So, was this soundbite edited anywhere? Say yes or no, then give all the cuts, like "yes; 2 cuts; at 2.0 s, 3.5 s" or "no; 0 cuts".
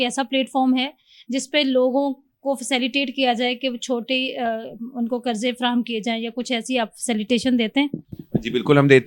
no; 0 cuts